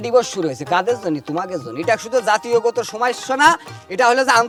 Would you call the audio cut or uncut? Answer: uncut